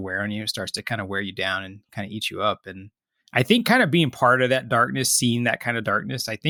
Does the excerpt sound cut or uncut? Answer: uncut